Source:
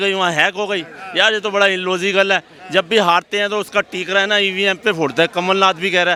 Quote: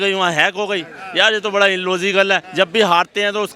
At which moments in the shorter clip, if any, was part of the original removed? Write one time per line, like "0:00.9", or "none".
0:02.5